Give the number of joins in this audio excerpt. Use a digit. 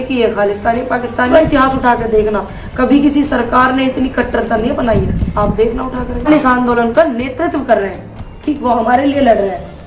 2